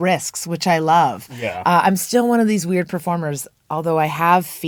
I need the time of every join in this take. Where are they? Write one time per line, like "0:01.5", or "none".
none